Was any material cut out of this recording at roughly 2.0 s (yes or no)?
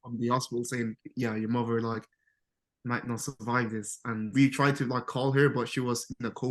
no